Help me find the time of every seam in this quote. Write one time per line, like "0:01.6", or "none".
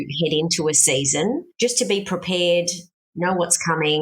0:01.5